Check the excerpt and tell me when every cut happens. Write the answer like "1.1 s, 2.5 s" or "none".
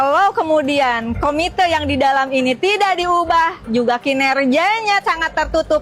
none

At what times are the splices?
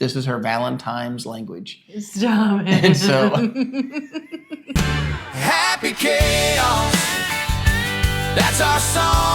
4.6 s

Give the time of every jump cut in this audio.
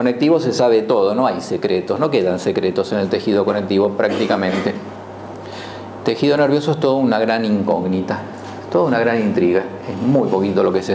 2.0 s

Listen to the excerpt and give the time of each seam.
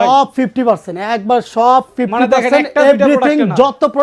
none

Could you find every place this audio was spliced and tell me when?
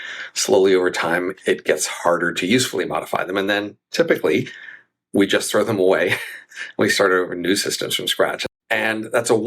8.4 s

